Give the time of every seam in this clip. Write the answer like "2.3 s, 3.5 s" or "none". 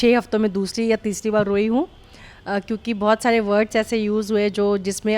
none